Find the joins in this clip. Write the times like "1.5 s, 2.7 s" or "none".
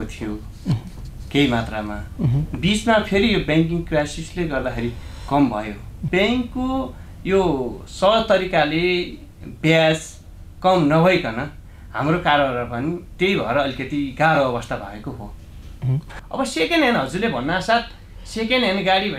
6.0 s, 16.2 s